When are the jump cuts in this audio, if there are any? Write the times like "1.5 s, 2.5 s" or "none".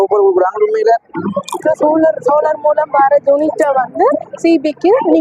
1.6 s